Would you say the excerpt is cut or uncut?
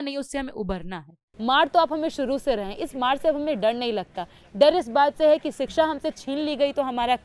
cut